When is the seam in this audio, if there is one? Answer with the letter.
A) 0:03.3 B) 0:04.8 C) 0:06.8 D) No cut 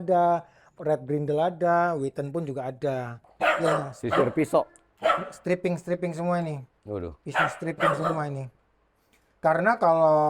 A